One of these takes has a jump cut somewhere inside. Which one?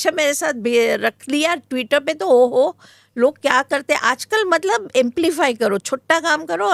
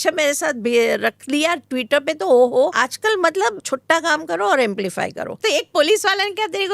second; 2 cuts; at 3.2 s, 5.4 s

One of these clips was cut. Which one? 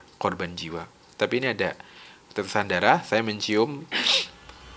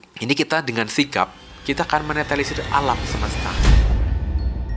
second; 1 cut; at 3.5 s

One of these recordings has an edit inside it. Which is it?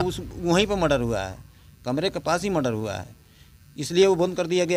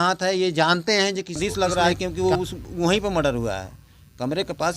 second; 1 cut; at 1.4 s

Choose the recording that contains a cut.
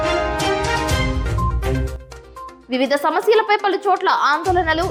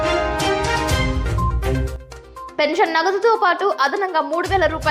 second; 1 cut; at 2.5 s

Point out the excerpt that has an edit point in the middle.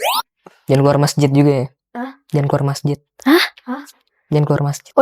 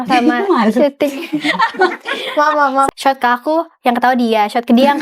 second; 1 cut; at 2.9 s

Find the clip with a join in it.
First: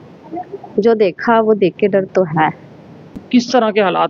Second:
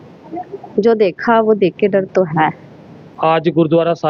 first; 1 cut; at 3.2 s

